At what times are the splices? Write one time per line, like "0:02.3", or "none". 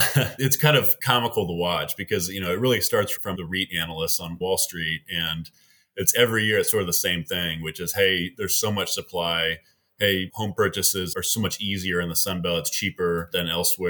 0:01.0
0:03.3